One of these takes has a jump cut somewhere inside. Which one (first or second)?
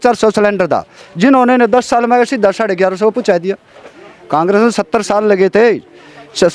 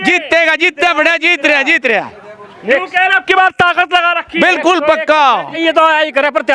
second